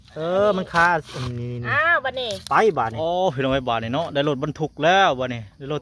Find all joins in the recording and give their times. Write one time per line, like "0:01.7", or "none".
0:02.9